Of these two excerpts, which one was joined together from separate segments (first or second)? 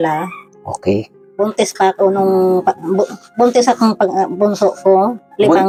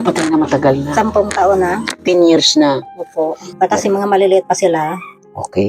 second